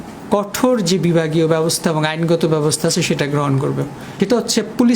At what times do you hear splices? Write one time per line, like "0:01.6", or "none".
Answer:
0:04.1